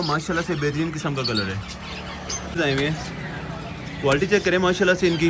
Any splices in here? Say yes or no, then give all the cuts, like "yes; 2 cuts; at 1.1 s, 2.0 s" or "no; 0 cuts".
yes; 1 cut; at 2.6 s